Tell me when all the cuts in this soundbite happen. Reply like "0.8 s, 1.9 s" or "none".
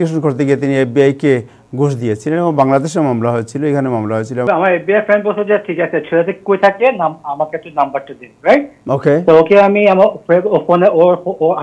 4.4 s